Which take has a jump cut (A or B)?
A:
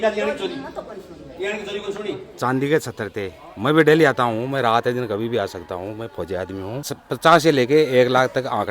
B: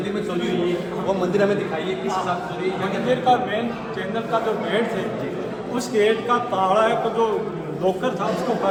A